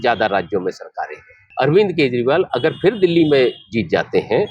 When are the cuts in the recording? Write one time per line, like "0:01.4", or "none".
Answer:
0:01.4